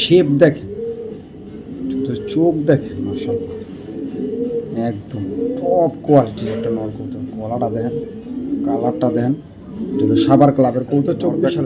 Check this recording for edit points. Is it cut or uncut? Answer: uncut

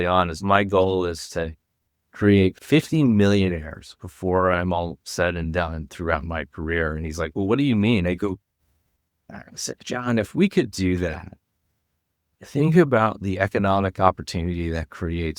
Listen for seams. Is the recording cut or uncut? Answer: cut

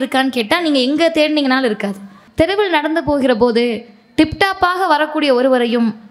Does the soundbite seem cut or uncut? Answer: cut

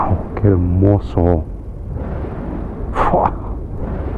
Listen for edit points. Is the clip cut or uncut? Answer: uncut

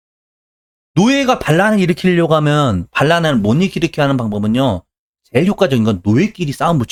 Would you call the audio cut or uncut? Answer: uncut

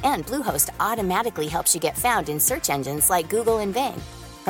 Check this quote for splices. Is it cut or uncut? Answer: uncut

